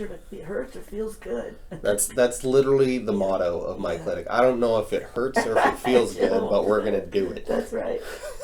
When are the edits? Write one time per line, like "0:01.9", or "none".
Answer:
none